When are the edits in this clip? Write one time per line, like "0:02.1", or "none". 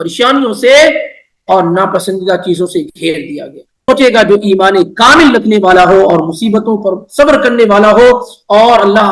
0:03.9